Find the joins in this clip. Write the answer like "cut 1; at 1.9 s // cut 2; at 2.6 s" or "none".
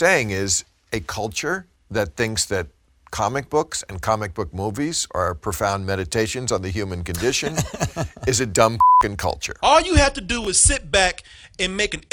cut 1; at 1.8 s // cut 2; at 9.5 s